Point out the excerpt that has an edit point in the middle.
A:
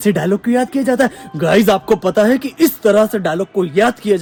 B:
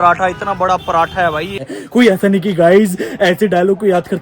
B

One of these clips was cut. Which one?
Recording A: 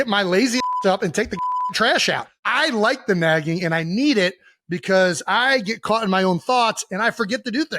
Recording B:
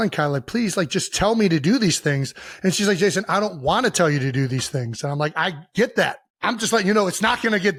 A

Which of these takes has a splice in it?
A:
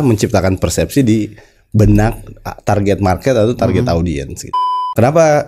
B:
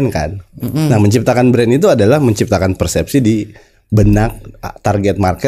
A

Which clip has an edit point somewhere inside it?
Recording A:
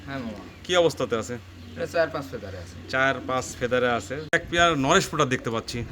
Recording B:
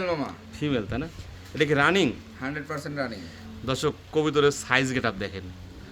A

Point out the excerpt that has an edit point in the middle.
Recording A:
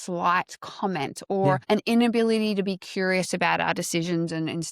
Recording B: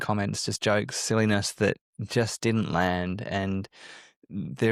A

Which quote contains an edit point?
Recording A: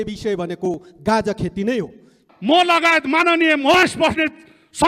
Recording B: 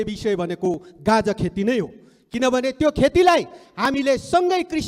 A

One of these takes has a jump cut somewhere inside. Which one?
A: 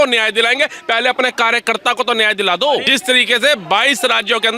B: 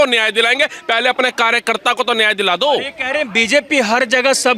A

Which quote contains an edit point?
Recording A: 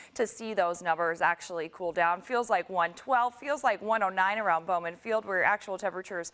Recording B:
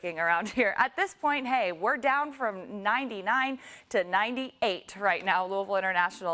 A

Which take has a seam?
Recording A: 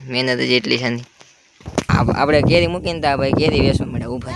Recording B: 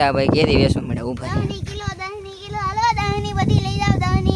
A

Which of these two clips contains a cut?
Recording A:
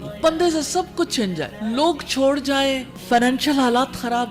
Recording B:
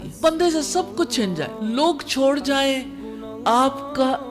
A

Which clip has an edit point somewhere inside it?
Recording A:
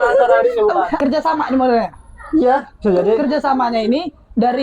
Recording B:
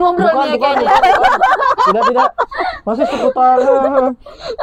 A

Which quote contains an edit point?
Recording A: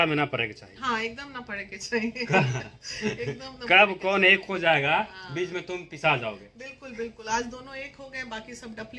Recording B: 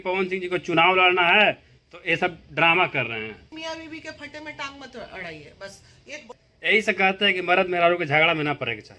B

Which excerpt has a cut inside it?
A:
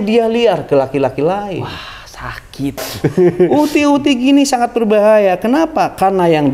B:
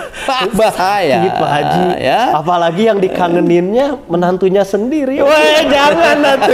A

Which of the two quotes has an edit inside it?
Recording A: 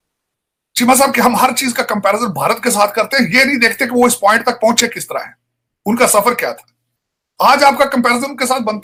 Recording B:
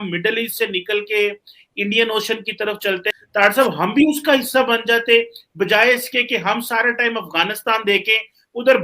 B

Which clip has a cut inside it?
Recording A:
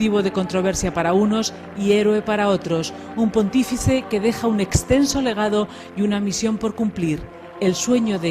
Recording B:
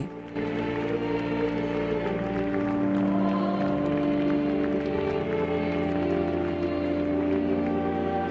A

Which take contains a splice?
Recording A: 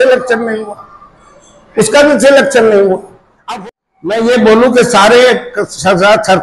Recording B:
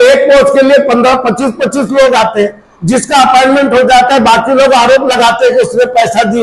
A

